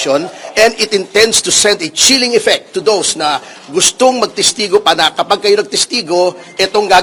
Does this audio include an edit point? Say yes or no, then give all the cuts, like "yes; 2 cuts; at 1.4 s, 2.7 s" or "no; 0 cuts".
no; 0 cuts